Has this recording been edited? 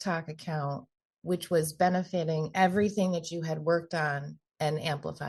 no; 0 cuts

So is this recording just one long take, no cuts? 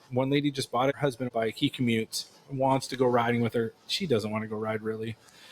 no; 1 cut; at 1.3 s

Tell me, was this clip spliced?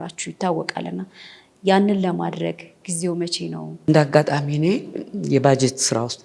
yes; 1 cut; at 3.8 s

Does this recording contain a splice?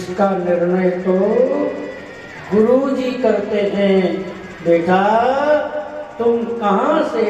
no; 0 cuts

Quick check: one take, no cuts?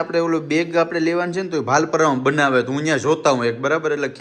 yes; 0 cuts

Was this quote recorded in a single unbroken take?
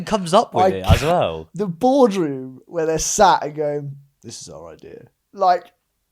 yes; 0 cuts

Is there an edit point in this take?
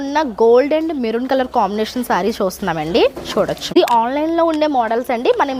yes; 1 cut; at 3.7 s

